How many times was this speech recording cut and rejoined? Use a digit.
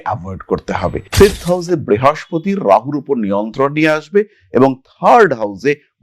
1